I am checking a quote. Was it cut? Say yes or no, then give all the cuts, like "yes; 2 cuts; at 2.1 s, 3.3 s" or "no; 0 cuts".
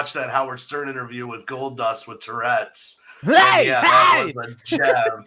no; 0 cuts